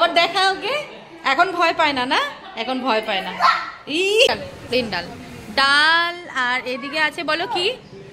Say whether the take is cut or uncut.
cut